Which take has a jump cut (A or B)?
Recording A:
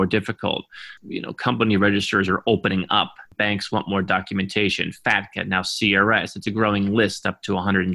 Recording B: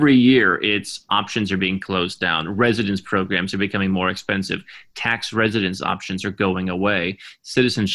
A